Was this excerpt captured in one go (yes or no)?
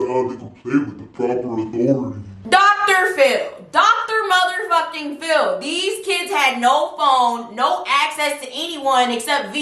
yes